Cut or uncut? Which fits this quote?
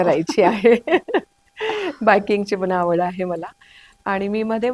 uncut